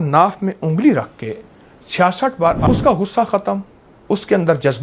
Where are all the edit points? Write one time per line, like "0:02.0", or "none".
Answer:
0:02.7